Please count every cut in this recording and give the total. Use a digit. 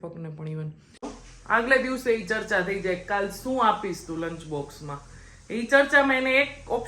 1